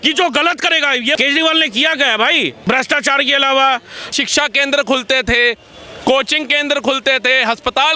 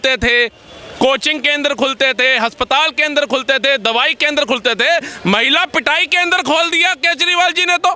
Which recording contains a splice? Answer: first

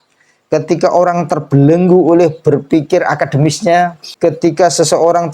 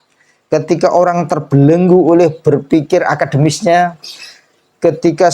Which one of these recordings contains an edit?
first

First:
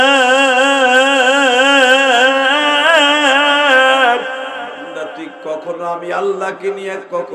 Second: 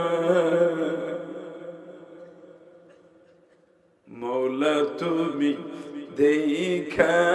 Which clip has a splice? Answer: first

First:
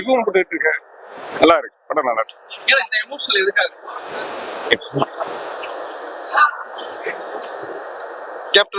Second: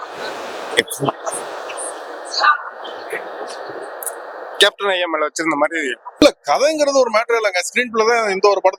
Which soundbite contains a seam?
second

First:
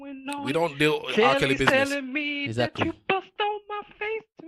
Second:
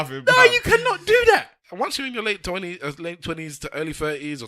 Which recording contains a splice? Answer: second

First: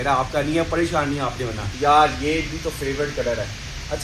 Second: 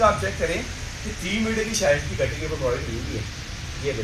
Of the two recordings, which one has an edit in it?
first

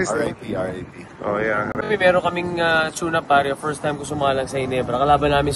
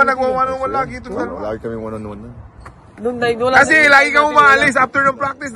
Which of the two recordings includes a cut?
first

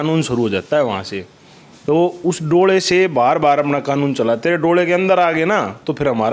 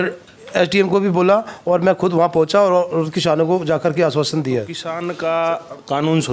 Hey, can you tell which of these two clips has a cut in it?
second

